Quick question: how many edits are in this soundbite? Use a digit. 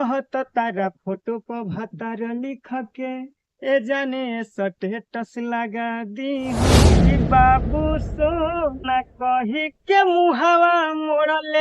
1